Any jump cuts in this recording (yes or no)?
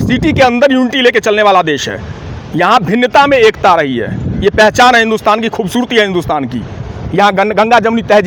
no